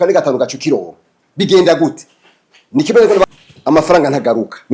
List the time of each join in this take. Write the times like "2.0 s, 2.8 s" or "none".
3.2 s